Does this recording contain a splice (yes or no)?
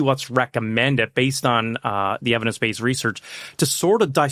no